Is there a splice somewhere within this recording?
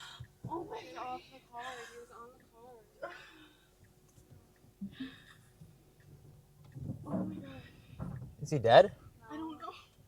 no; 0 cuts

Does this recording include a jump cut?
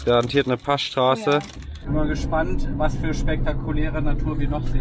yes; 1 cut; at 1.8 s

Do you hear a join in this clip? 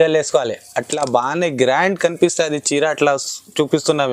no; 0 cuts

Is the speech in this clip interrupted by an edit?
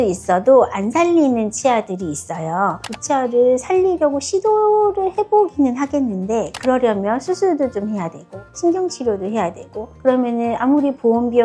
yes; 1 cut; at 2.8 s

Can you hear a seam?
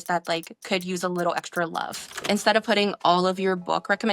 yes; 1 cut; at 2.2 s

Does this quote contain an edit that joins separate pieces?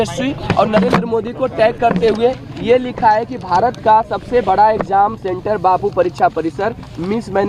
no; 0 cuts

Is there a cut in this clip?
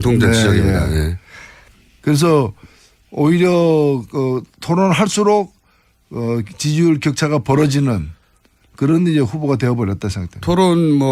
no; 0 cuts

